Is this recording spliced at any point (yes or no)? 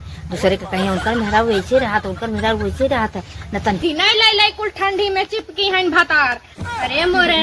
yes